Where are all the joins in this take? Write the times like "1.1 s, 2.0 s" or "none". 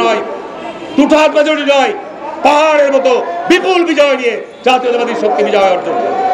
none